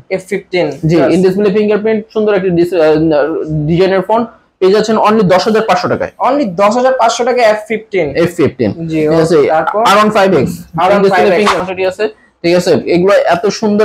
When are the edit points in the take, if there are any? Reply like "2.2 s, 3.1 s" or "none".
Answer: 11.6 s